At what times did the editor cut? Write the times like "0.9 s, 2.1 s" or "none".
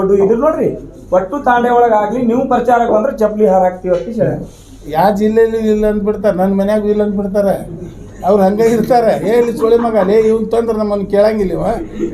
4.9 s